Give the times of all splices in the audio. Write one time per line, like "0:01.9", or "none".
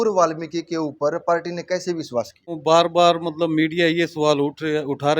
0:02.5